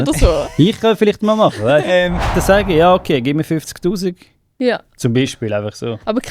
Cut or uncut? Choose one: cut